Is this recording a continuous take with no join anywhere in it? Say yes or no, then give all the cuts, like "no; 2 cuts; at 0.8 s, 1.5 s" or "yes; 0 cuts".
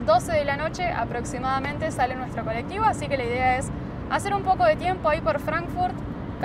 yes; 0 cuts